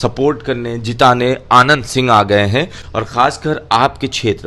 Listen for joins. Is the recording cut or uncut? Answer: uncut